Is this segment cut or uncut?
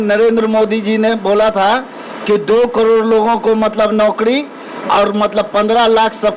uncut